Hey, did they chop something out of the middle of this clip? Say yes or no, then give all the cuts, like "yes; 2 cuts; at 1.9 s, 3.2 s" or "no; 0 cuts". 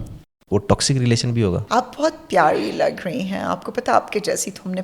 yes; 1 cut; at 1.6 s